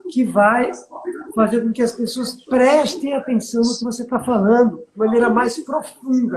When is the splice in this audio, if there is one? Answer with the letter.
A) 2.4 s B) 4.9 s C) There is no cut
B